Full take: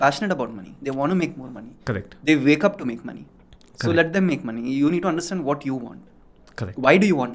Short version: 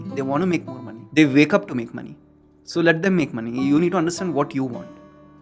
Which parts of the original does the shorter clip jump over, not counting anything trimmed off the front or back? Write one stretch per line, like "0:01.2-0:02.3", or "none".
0:01.7-0:02.1